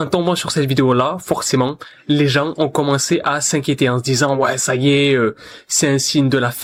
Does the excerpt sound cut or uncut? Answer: uncut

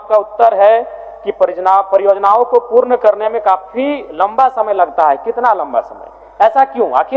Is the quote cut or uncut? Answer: uncut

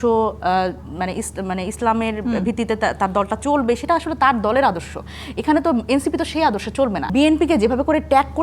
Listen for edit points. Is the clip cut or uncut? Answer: cut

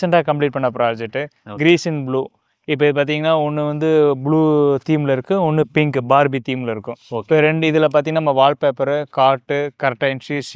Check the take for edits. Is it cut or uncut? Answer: uncut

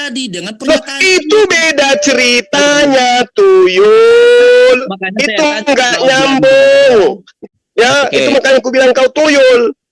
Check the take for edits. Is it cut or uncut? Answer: cut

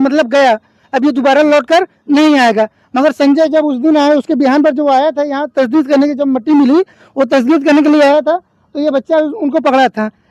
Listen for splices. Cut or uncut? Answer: uncut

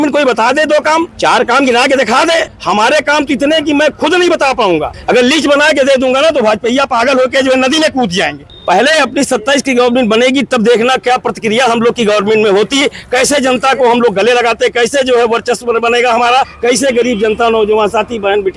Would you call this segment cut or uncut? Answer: cut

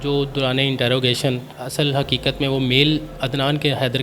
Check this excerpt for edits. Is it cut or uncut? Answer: cut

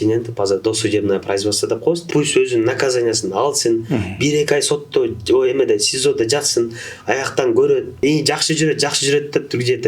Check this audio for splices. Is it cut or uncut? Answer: cut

